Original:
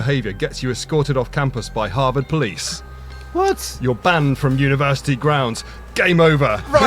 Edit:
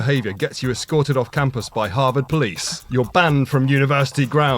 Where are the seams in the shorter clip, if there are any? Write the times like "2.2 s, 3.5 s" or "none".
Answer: 2.8 s